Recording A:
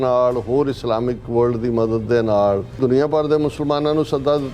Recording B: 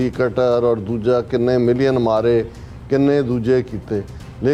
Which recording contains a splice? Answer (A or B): A